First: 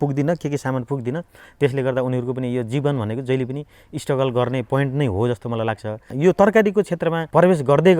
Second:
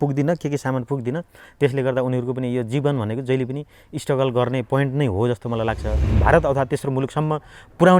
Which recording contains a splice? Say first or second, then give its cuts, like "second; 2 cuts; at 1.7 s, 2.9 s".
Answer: second; 1 cut; at 6.1 s